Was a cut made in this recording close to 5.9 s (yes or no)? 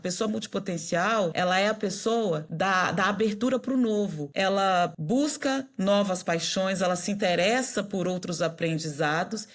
no